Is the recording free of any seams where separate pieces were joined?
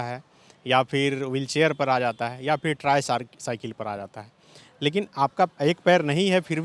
no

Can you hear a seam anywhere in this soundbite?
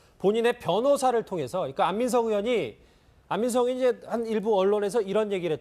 no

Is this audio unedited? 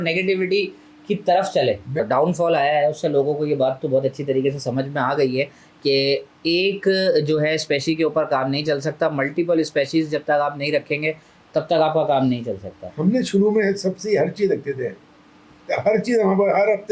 no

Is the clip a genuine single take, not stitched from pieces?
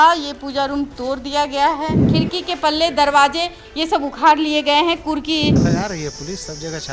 no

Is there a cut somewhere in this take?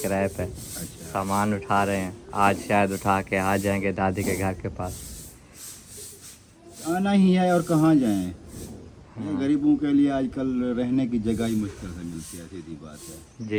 no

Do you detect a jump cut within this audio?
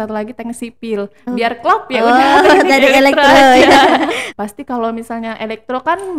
yes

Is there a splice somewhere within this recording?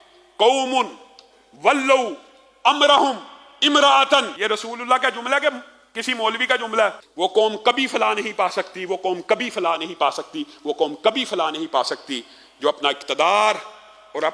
yes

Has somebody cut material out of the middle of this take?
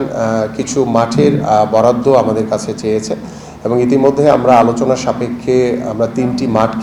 no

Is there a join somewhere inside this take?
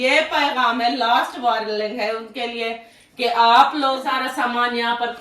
yes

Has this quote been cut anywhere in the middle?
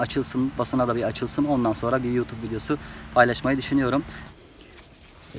yes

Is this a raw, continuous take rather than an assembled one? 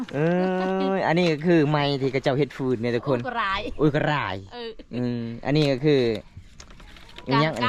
yes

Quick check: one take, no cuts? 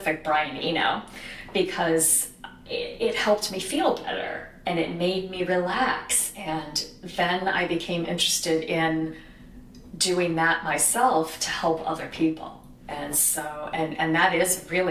yes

